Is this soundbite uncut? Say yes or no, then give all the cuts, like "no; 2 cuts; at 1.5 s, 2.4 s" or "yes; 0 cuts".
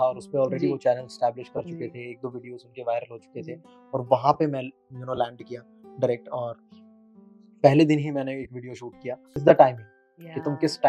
no; 1 cut; at 9.3 s